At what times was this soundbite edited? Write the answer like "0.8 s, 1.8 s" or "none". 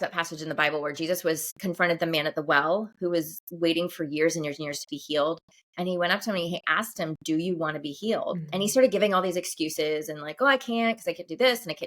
1.5 s